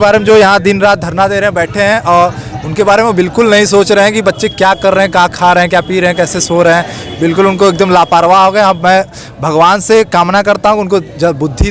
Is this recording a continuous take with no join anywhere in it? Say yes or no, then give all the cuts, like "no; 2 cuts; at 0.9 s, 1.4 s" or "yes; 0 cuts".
yes; 0 cuts